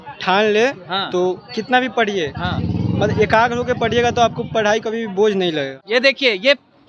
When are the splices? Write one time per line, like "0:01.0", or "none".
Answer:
0:05.8